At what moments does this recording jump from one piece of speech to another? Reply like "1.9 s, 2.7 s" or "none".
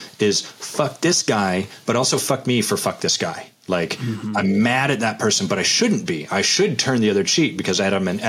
none